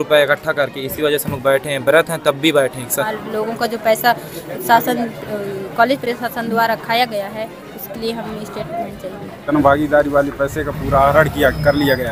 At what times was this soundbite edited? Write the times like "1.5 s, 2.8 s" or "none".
2.8 s, 9.4 s